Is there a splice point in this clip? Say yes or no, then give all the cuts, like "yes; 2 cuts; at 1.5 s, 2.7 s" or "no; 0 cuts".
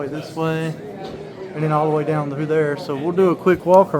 no; 0 cuts